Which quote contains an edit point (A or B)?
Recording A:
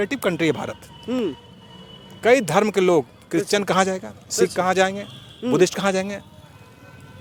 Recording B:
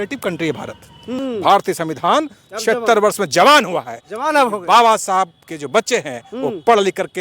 B